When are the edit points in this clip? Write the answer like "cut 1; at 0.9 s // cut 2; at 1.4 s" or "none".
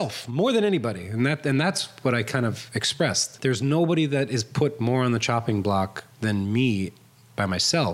cut 1; at 3.3 s // cut 2; at 6.0 s